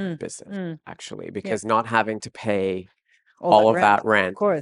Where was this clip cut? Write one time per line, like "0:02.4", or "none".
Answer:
none